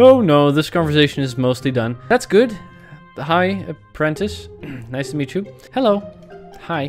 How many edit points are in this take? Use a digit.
1